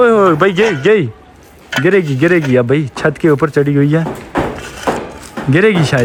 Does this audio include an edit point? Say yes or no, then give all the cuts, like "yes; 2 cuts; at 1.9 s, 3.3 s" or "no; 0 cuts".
no; 0 cuts